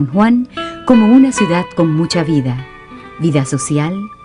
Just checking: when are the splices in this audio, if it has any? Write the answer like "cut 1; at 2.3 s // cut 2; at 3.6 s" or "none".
cut 1; at 1.7 s